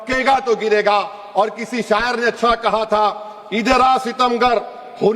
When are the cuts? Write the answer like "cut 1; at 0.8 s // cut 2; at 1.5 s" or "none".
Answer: none